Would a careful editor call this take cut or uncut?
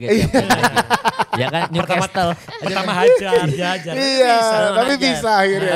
uncut